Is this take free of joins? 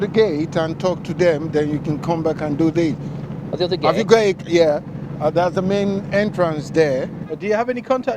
no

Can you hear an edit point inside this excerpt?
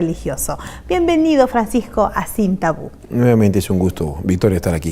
yes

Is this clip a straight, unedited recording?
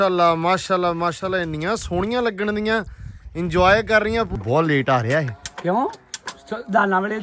no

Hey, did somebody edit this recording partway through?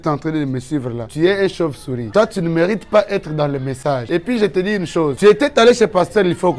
no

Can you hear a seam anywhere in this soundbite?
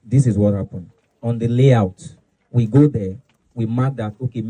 no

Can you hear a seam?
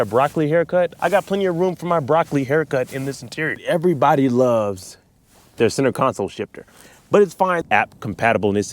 yes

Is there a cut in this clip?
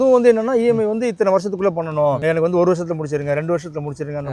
yes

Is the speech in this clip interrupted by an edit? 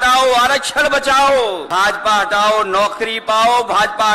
yes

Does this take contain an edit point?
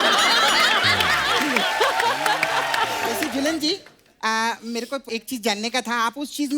yes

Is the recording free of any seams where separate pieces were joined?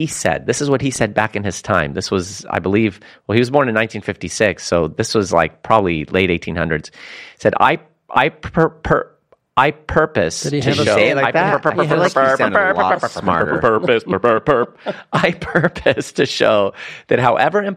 yes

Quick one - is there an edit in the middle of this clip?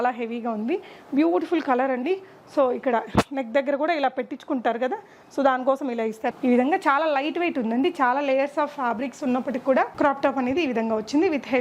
yes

